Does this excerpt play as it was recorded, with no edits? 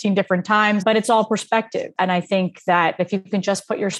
no; 2 cuts; at 0.8 s, 3.0 s

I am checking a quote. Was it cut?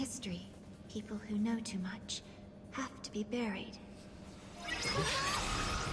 no; 0 cuts

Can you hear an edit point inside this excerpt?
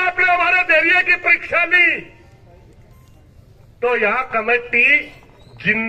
no; 0 cuts

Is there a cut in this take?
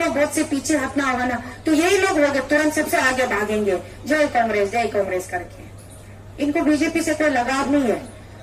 no; 0 cuts

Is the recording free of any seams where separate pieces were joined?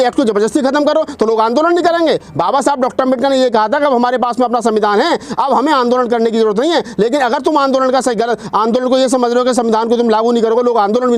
yes; 0 cuts

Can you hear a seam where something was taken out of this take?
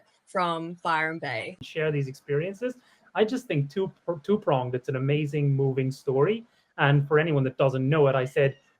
yes; 1 cut; at 1.5 s

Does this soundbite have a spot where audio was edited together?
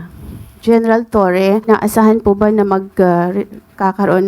yes; 1 cut; at 1.6 s

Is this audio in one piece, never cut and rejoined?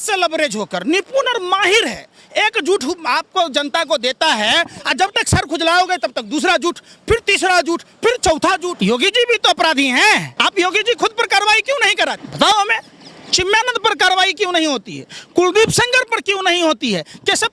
no; 3 cuts; at 8.7 s, 10.3 s, 12.3 s

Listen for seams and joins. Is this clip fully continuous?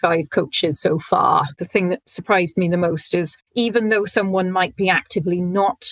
no; 1 cut; at 1.6 s

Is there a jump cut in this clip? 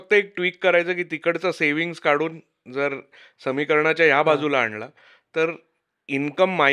no; 0 cuts

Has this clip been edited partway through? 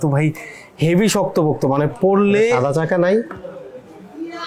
no; 0 cuts

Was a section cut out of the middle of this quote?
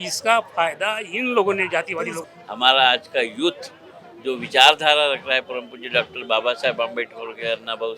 yes; 1 cut; at 2.2 s

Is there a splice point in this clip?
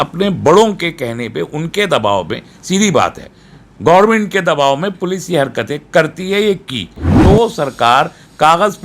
yes; 1 cut; at 7.1 s

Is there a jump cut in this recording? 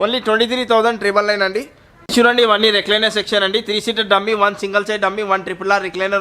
yes; 1 cut; at 1.8 s

